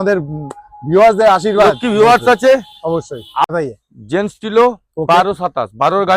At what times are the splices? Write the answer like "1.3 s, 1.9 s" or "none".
3.5 s